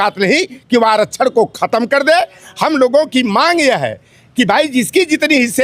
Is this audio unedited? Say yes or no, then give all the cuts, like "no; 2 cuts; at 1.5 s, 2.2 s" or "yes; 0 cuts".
yes; 0 cuts